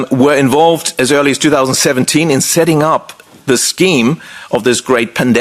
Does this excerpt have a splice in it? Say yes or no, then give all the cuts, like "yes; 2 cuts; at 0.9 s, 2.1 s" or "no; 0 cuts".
no; 0 cuts